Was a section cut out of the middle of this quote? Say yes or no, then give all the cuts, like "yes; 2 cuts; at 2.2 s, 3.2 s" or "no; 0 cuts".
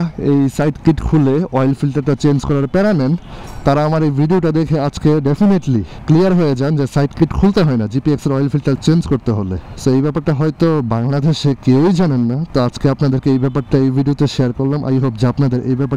no; 0 cuts